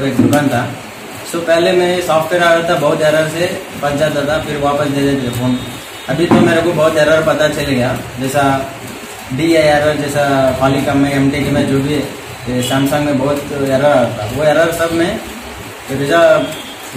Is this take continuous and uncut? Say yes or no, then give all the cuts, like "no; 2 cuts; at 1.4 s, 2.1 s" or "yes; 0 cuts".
yes; 0 cuts